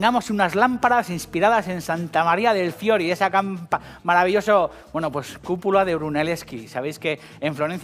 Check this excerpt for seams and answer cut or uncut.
uncut